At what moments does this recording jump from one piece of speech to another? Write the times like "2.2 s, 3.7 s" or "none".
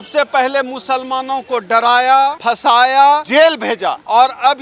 2.4 s, 3.7 s